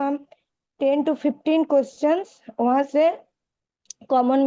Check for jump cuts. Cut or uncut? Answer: uncut